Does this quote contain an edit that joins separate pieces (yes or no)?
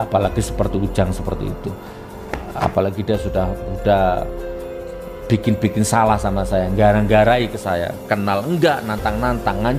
no